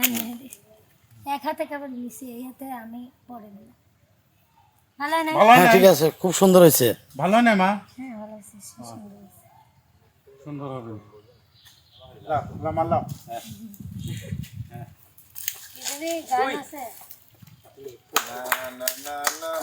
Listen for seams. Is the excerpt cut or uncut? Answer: uncut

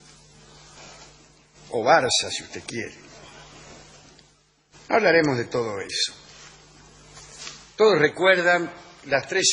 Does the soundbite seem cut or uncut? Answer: uncut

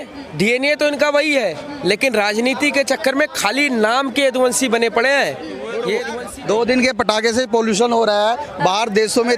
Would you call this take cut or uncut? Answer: cut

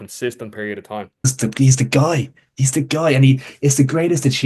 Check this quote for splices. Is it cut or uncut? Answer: cut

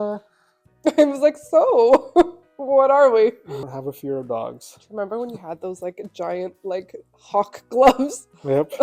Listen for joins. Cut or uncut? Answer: cut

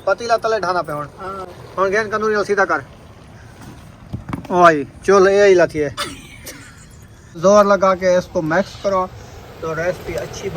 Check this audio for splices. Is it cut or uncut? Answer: cut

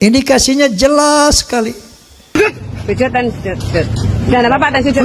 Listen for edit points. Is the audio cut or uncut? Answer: cut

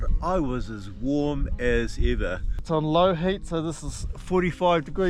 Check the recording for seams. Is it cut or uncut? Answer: cut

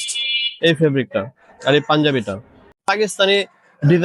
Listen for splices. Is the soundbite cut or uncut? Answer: cut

